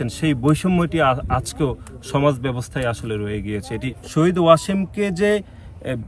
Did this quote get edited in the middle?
yes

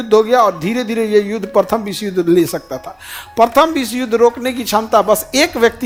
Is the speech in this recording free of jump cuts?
yes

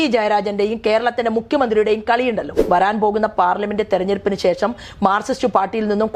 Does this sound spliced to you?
yes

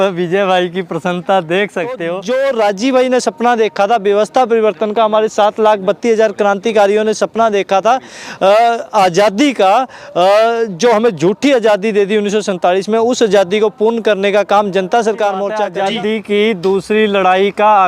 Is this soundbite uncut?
no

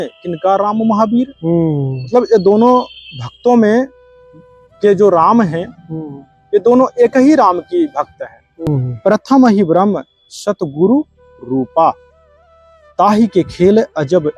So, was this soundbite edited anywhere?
yes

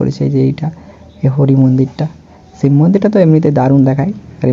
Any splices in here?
no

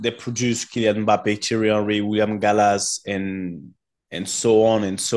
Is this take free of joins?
yes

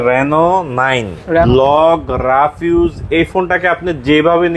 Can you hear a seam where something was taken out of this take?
yes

